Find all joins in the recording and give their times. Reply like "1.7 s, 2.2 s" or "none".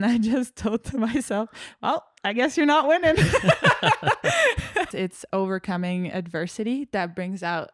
4.9 s

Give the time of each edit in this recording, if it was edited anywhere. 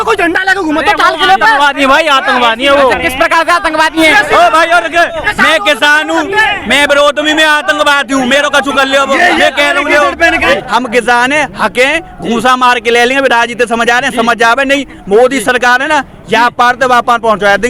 10.5 s

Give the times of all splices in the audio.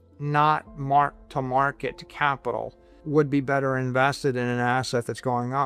3.0 s

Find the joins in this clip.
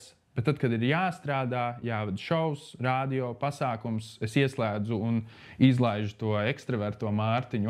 none

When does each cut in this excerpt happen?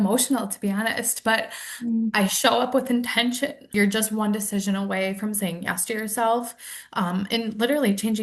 3.7 s

